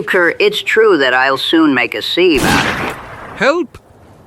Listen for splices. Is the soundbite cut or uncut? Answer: uncut